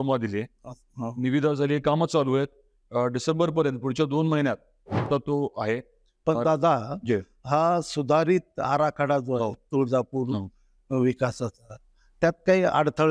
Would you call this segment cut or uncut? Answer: cut